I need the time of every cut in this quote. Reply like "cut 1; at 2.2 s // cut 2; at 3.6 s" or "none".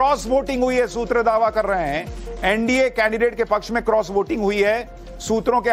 none